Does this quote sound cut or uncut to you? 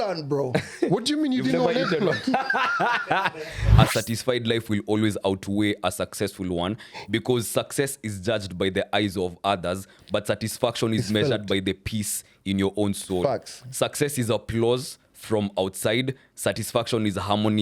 cut